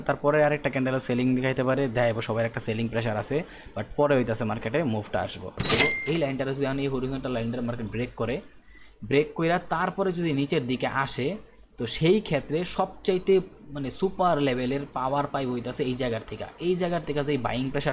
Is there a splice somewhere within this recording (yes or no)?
yes